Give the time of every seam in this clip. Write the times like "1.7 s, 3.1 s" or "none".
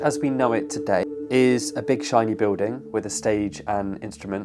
1.0 s